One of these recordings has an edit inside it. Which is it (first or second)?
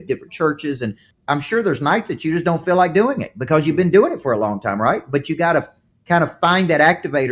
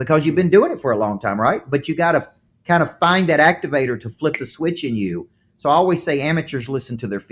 first